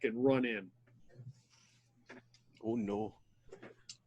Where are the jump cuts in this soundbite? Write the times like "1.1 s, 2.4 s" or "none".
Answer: 0.9 s